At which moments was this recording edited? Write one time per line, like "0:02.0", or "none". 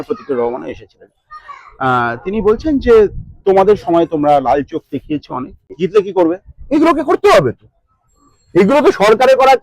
0:05.7

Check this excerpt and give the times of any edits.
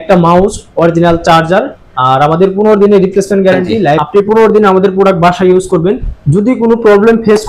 0:04.0

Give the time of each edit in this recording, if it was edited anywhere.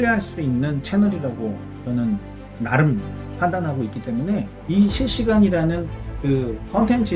0:02.4
0:04.6

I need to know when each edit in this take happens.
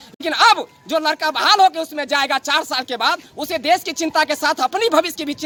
none

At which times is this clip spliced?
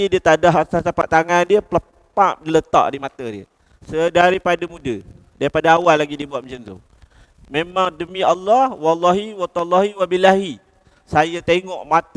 none

